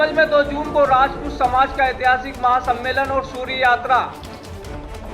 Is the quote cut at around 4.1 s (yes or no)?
yes